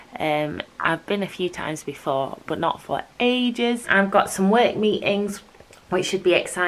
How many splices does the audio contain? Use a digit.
1